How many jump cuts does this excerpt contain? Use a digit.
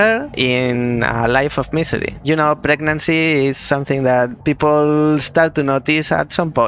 2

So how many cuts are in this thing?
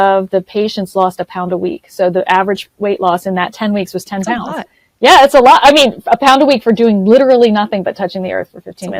0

